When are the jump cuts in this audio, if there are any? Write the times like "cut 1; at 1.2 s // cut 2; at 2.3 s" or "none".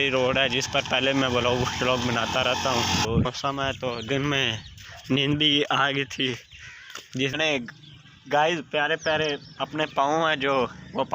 cut 1; at 3.2 s // cut 2; at 7.3 s

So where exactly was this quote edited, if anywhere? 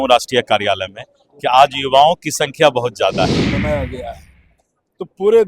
cut 1; at 3.5 s

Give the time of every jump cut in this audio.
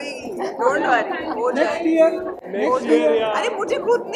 none

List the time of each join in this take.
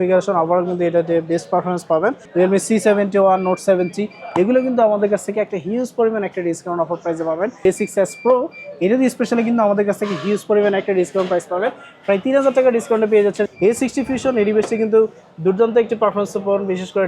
cut 1; at 2.2 s // cut 2; at 7.6 s // cut 3; at 13.5 s

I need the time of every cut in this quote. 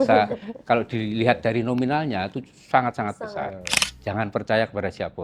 cut 1; at 3.8 s

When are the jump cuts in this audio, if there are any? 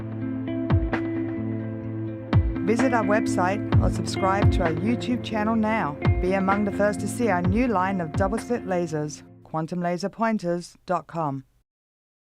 cut 1; at 6.1 s

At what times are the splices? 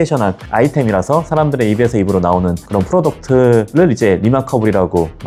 none

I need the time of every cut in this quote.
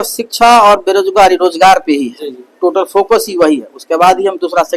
none

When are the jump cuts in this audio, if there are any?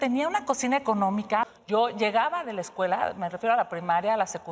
cut 1; at 1.5 s

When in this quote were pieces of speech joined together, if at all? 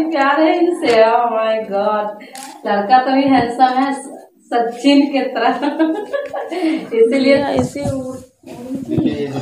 cut 1; at 7.4 s

